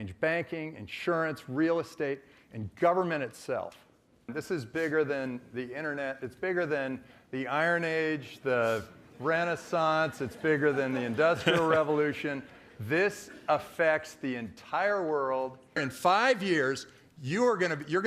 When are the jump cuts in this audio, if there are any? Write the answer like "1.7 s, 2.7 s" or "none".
4.3 s, 15.9 s